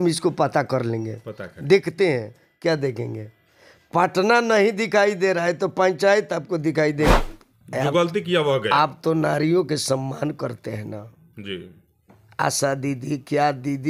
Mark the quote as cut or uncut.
cut